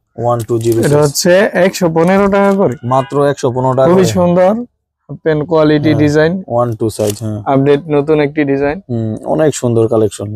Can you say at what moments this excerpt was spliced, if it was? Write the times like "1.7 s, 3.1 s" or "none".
none